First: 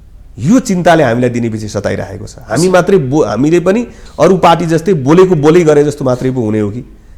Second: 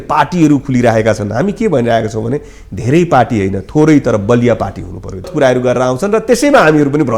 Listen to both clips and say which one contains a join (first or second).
second